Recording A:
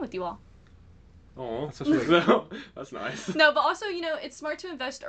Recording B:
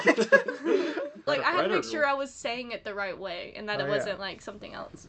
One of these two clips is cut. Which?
B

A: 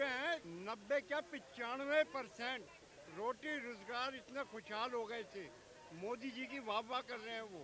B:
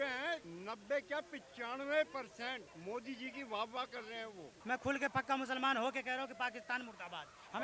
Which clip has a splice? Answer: B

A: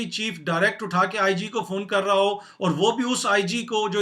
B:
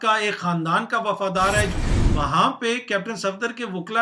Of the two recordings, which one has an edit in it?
B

